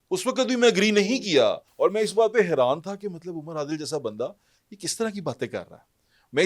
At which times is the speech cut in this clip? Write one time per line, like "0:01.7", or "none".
0:01.6